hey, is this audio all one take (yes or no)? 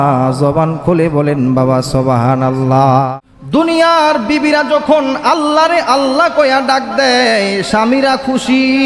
no